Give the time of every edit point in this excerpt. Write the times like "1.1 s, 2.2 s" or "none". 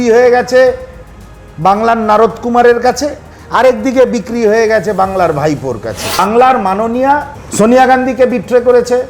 6.2 s, 7.4 s